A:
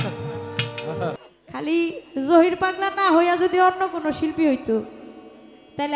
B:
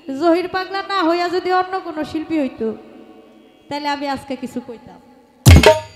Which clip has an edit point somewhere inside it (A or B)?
A